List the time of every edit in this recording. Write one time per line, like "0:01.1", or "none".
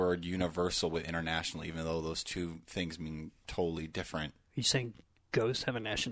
none